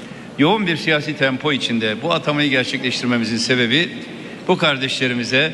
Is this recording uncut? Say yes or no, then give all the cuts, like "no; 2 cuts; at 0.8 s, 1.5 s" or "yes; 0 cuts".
yes; 0 cuts